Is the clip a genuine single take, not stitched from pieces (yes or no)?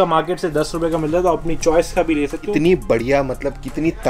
no